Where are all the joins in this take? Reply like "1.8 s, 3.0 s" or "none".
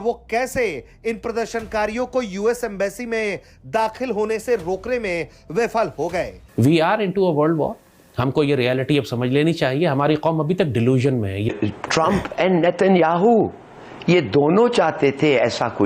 6.4 s, 11.5 s